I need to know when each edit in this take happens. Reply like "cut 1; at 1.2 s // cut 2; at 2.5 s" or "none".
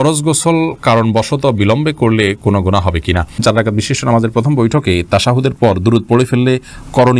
cut 1; at 3.3 s